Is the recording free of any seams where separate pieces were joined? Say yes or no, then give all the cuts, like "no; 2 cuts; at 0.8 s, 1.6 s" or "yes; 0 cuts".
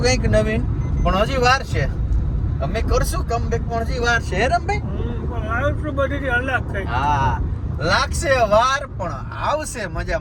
yes; 0 cuts